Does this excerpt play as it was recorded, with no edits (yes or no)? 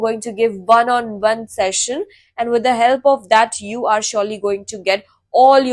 yes